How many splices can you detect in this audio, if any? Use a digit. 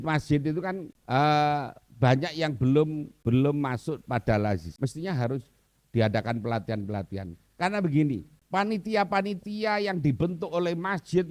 4